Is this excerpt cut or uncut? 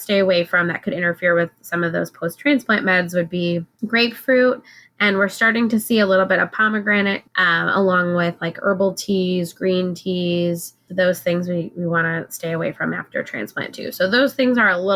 cut